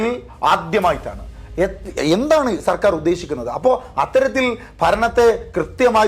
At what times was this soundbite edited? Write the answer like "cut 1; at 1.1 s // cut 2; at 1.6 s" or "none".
none

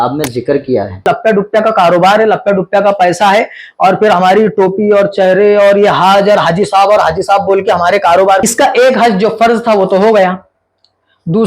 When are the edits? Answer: cut 1; at 1.1 s // cut 2; at 8.4 s

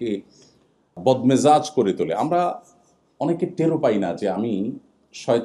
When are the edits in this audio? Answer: cut 1; at 1.0 s

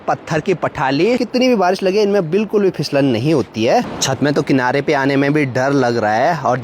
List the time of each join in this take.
cut 1; at 1.2 s // cut 2; at 3.9 s

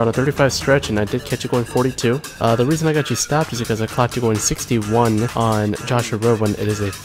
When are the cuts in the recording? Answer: cut 1; at 2.3 s // cut 2; at 5.3 s

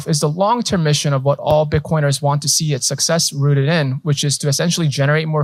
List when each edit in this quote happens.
none

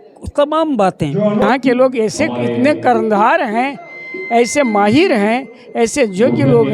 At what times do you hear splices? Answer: cut 1; at 1.4 s

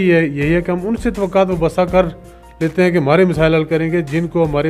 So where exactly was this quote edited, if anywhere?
none

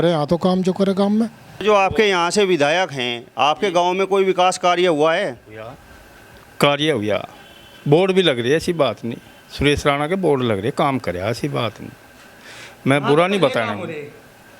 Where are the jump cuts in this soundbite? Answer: cut 1; at 1.6 s

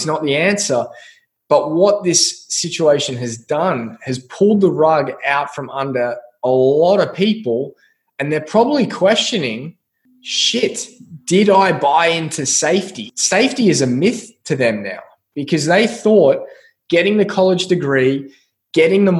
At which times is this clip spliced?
cut 1; at 13.0 s

